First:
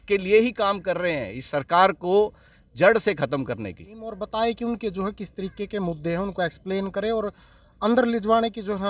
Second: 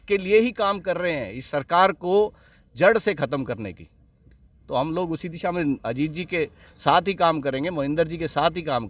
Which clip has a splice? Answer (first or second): first